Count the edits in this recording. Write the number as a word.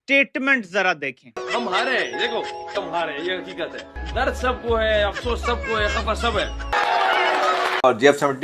two